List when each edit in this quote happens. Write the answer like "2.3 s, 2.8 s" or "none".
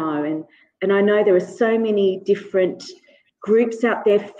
none